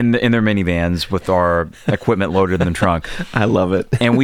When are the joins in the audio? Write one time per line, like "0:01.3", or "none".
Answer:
none